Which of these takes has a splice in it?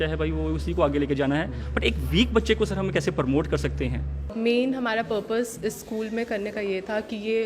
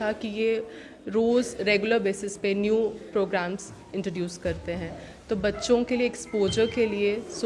first; 1 cut; at 4.3 s

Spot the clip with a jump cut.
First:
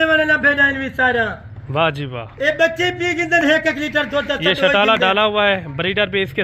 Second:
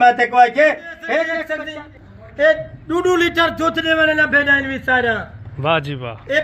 second; 1 cut; at 1.4 s

